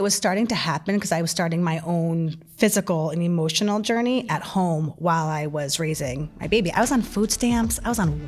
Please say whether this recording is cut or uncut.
uncut